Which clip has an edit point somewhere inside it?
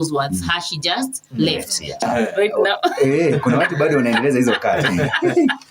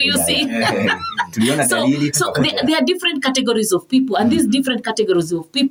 first; 1 cut; at 2.0 s

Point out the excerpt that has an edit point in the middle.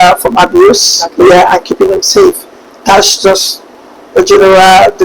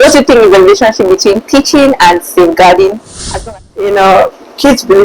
second; 1 cut; at 3.4 s

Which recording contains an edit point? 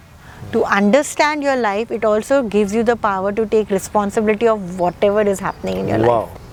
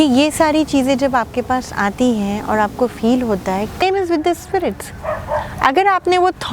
second; 1 cut; at 3.8 s

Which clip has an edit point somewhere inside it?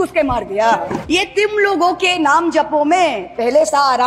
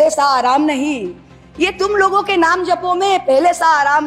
first; 1 cut; at 1.0 s

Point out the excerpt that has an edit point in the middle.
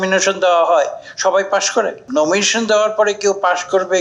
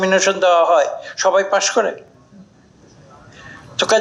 first; 1 cut; at 2.0 s

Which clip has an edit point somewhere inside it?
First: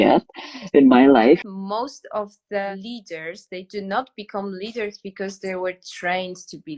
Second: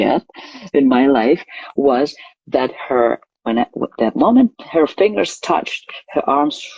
first; 2 cuts; at 1.6 s, 2.7 s

